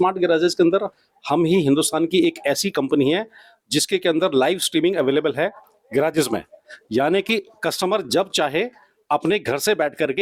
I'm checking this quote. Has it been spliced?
no; 0 cuts

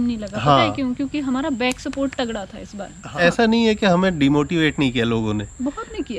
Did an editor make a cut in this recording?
yes; 1 cut; at 3.0 s

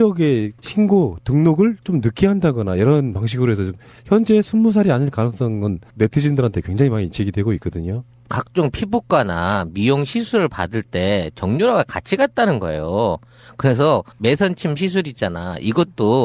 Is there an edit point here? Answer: no; 0 cuts

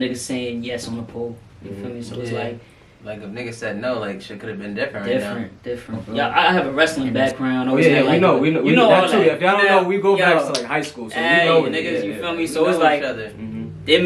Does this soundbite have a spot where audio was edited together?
yes; 1 cut; at 6.0 s

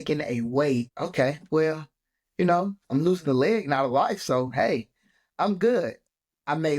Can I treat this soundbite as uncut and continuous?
no; 1 cut; at 1.0 s

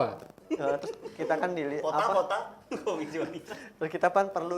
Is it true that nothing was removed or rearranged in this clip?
yes; 0 cuts

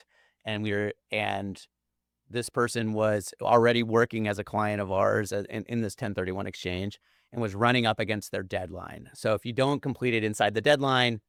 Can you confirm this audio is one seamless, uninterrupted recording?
yes; 0 cuts

